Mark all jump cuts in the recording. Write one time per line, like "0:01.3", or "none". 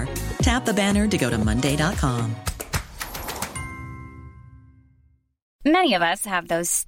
0:05.4